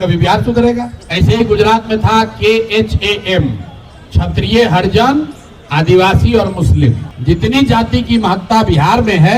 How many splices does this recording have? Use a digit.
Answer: 2